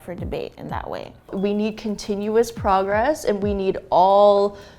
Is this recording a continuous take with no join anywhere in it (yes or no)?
no